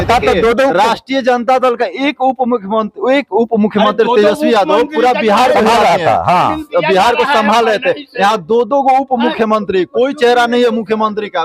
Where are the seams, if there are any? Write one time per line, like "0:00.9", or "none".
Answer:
none